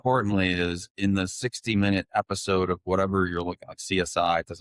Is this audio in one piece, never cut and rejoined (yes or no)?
yes